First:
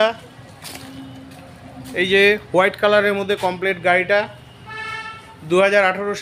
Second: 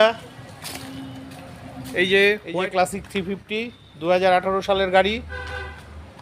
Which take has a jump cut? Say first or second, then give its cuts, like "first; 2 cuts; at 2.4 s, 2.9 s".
second; 1 cut; at 2.4 s